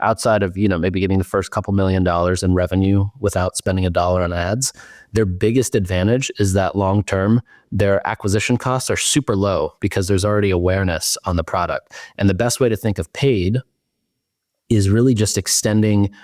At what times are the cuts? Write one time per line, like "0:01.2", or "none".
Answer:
none

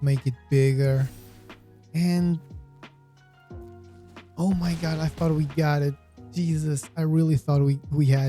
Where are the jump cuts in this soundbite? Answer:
0:03.0
0:04.3

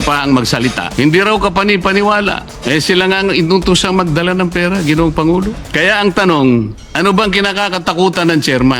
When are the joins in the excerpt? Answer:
0:00.8
0:02.5
0:05.6
0:06.8

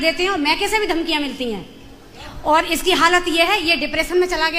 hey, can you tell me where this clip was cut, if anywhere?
none

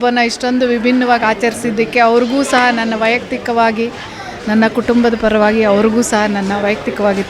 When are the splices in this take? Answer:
none

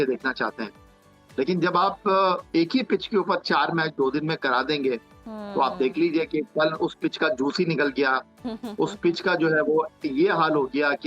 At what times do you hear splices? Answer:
none

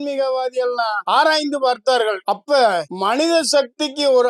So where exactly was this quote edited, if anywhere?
0:01.0

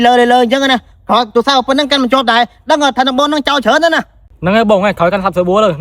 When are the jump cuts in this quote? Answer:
none

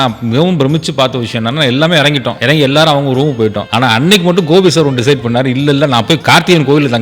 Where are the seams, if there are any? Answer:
0:02.3
0:03.6

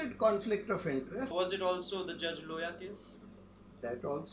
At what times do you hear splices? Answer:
0:01.3

